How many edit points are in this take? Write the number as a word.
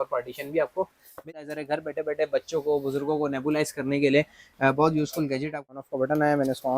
two